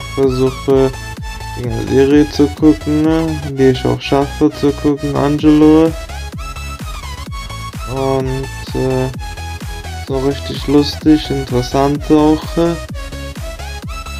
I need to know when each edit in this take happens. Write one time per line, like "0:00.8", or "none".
none